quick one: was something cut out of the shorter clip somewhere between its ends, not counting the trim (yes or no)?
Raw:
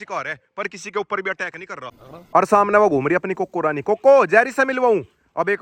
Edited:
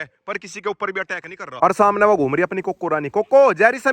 yes